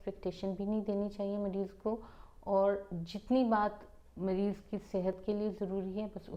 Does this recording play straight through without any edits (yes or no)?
yes